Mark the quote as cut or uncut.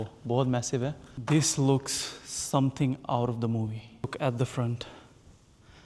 cut